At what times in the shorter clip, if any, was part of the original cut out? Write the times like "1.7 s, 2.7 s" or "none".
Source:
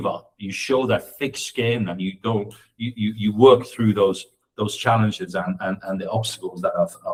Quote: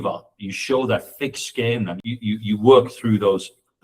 2.0 s